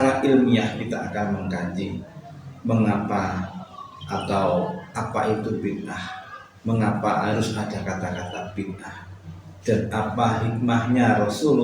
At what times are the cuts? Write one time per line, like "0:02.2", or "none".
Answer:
none